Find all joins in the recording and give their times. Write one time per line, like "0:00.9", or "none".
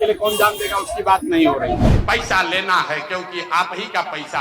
0:01.9